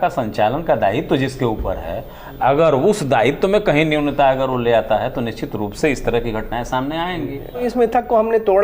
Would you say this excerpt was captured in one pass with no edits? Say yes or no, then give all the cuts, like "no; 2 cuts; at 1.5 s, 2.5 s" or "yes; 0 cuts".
no; 1 cut; at 7.6 s